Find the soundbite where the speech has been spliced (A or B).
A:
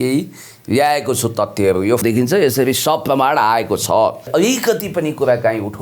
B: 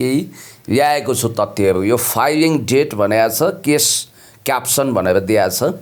A